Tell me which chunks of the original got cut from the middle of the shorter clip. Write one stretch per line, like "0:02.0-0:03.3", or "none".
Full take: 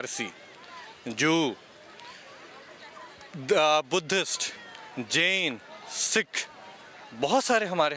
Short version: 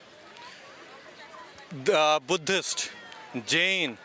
none